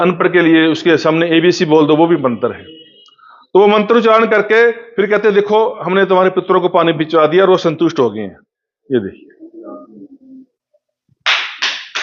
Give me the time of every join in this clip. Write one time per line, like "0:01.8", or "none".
none

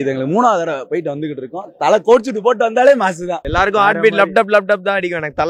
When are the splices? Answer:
0:03.5

